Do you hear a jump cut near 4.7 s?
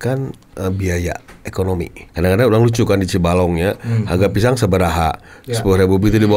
no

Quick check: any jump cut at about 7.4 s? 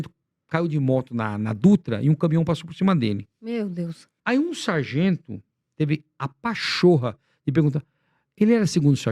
no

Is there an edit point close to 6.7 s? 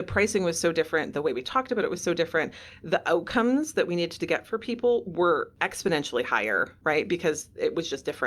yes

